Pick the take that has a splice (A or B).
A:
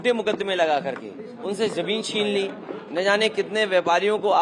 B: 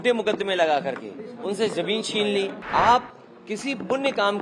B